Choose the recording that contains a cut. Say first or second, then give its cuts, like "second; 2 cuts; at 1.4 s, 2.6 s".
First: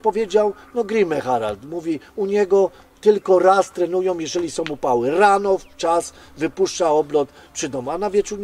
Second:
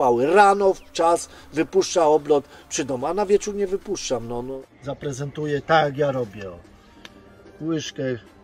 second; 1 cut; at 4.5 s